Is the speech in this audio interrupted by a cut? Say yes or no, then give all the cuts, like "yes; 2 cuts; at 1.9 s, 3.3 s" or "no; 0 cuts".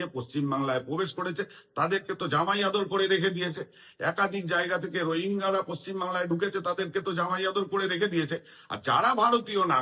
no; 0 cuts